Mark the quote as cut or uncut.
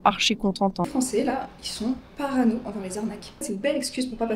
cut